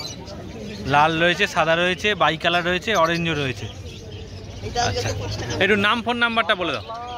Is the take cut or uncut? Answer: uncut